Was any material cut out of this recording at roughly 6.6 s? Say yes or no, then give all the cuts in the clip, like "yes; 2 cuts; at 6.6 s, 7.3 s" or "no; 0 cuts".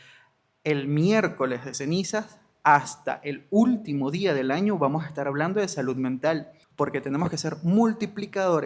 yes; 1 cut; at 6.6 s